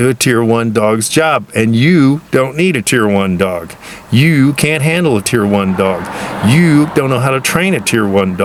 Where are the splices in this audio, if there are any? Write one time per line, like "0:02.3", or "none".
none